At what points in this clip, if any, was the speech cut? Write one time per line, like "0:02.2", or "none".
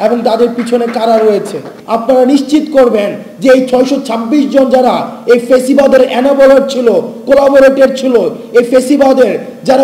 0:01.7